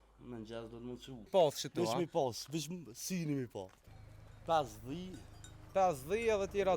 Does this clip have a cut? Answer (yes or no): yes